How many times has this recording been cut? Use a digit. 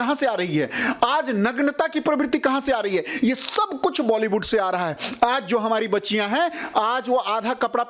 0